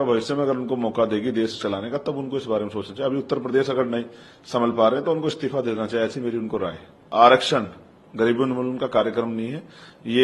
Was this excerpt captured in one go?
no; 1 cut; at 7.0 s

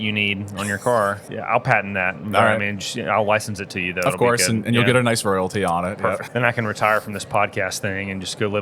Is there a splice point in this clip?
yes; 2 cuts; at 1.3 s, 6.3 s

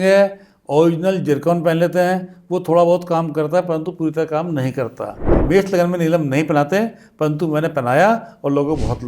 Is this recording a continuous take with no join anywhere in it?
no; 1 cut; at 5.3 s

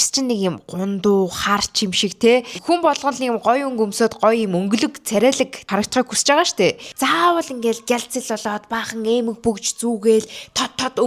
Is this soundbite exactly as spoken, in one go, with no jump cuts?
no; 3 cuts; at 2.5 s, 5.6 s, 6.9 s

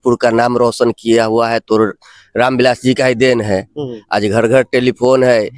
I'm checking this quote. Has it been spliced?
no; 0 cuts

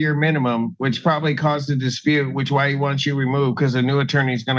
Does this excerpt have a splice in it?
no; 0 cuts

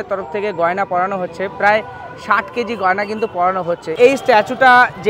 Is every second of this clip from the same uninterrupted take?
no; 1 cut; at 3.9 s

